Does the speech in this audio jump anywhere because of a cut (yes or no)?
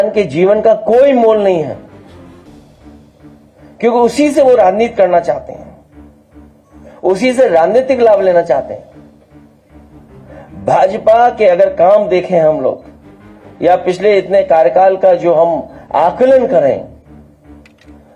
no